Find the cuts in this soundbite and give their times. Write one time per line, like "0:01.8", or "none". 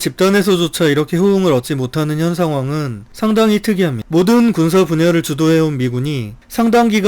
0:04.0